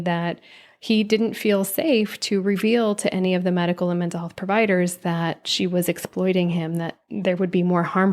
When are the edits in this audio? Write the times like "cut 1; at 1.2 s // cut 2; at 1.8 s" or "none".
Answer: none